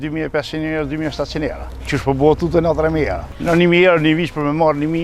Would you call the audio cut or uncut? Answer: uncut